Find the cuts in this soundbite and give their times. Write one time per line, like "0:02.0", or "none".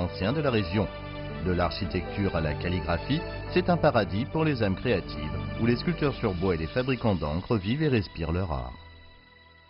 0:08.8